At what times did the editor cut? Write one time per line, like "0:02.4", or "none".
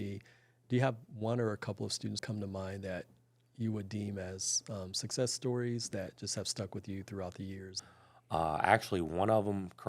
0:02.2
0:07.7